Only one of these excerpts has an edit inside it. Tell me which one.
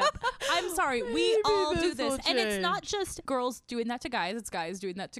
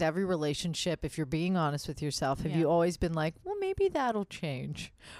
first; 1 cut; at 3.2 s

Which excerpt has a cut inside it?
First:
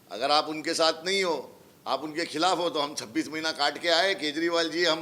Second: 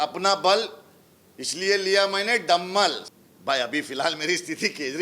second; 1 cut; at 3.1 s

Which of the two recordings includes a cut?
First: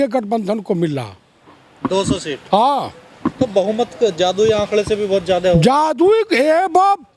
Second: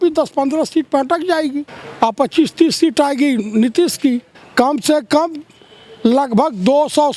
second; 2 cuts; at 1.8 s, 4.4 s

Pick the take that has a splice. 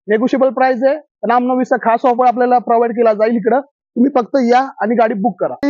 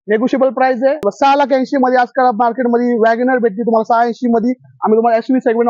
second; 1 cut; at 1.1 s

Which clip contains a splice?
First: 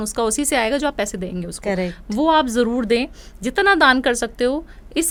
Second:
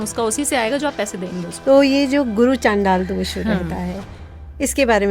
second; 1 cut; at 1.5 s

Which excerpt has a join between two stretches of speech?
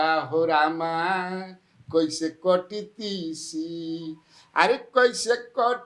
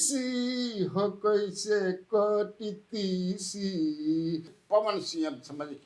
second; 1 cut; at 4.5 s

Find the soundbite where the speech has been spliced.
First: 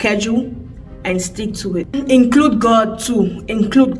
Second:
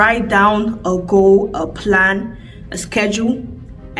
first; 1 cut; at 2.0 s

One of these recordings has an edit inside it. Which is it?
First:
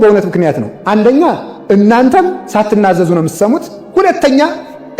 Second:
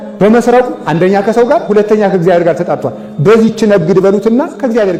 first; 2 cuts; at 2.4 s, 3.8 s

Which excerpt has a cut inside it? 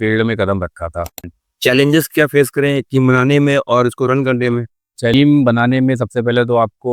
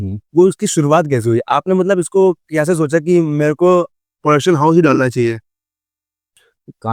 first; 2 cuts; at 1.2 s, 5.1 s

